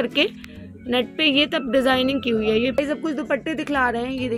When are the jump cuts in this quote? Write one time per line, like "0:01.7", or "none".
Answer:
0:02.8